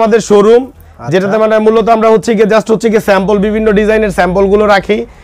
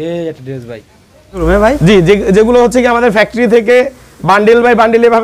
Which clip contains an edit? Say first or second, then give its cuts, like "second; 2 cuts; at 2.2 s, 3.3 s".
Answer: second; 1 cut; at 1.4 s